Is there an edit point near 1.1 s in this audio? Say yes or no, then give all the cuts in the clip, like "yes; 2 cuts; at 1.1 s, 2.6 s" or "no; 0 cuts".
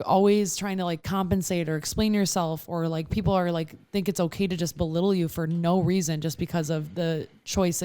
yes; 1 cut; at 1.1 s